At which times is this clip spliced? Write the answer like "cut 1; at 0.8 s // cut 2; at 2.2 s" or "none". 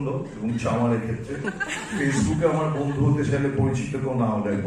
none